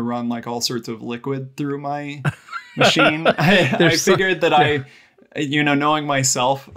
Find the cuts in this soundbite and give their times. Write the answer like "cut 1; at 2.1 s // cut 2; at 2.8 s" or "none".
none